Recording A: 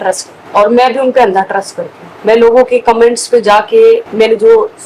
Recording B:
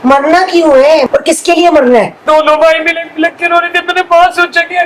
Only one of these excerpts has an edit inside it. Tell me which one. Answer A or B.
B